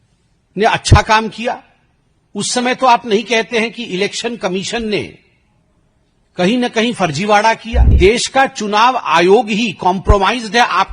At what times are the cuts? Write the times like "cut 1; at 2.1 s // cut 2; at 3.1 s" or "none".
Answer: cut 1; at 7.9 s